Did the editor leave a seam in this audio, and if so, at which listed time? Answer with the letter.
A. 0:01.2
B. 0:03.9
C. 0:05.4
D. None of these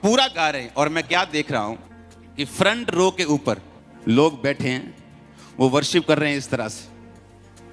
D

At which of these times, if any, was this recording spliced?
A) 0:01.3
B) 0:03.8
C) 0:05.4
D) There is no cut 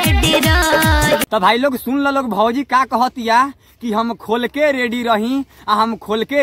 A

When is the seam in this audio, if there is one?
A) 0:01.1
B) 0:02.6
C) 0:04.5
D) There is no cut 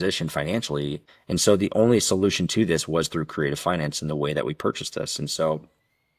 A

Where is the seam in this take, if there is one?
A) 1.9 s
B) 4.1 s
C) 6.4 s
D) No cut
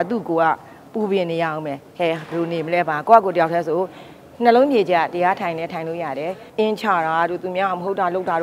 C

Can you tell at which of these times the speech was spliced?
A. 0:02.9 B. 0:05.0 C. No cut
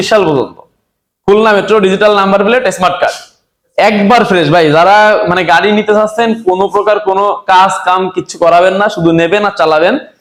C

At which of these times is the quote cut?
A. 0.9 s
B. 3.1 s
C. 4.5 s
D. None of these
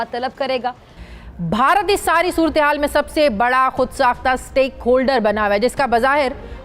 A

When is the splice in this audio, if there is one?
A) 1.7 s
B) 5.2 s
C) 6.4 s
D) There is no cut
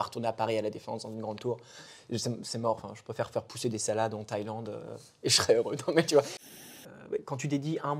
C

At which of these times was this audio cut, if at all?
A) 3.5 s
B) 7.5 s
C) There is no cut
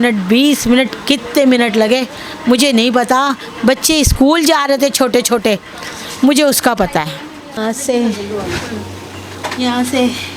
B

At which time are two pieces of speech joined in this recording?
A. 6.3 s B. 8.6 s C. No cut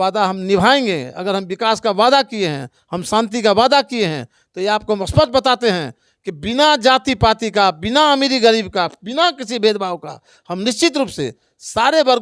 C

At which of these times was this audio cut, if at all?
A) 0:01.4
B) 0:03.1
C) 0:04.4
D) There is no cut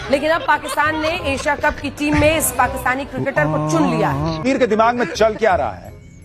C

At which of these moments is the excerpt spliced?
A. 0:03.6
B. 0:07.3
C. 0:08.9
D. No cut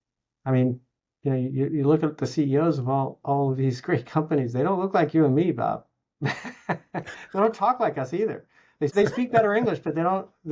C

